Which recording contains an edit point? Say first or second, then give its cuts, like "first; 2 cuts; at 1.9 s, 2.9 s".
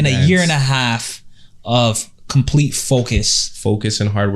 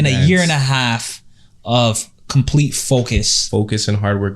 second; 1 cut; at 3.3 s